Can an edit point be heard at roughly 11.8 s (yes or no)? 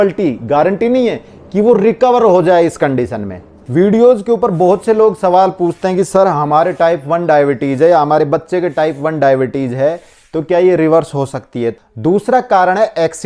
yes